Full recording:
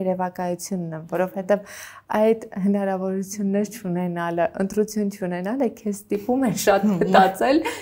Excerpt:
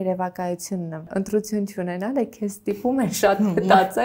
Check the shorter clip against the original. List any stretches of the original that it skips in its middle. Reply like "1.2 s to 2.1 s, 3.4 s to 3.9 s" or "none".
1.1 s to 4.5 s